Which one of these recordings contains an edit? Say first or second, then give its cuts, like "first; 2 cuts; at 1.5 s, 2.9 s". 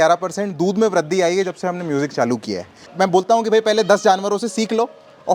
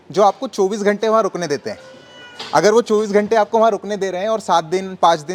first; 1 cut; at 2.9 s